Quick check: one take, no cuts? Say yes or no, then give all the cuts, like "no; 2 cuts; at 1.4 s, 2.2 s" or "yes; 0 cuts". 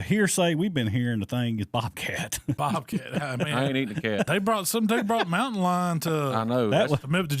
no; 2 cuts; at 2.6 s, 4.3 s